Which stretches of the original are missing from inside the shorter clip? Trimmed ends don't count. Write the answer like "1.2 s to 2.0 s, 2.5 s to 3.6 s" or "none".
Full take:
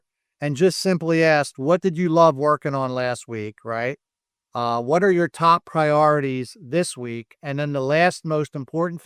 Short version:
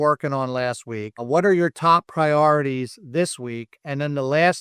3.6 s to 4.8 s